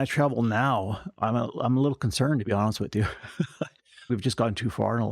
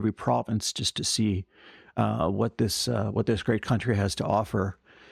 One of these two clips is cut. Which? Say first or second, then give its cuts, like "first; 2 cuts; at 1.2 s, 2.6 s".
first; 1 cut; at 4.1 s